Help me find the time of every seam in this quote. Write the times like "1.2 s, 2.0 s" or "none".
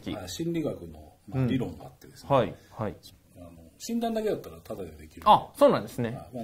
3.1 s